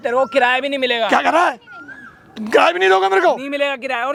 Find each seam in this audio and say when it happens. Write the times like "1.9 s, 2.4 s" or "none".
none